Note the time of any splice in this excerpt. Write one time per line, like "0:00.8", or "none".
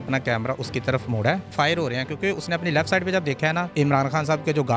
0:01.5
0:03.7